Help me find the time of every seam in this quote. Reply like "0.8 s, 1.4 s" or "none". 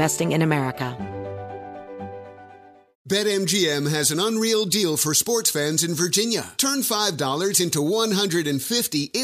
0.9 s